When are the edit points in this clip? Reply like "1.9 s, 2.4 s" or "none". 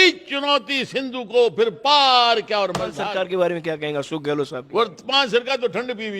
3.0 s